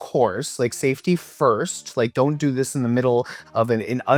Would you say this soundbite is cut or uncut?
uncut